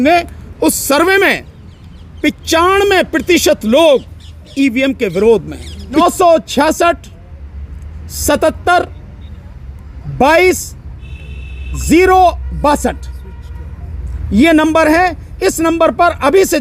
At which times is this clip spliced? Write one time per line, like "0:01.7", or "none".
0:06.0